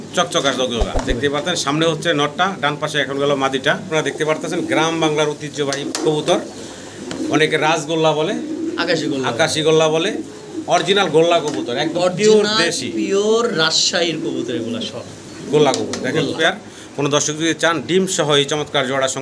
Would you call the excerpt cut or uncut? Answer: cut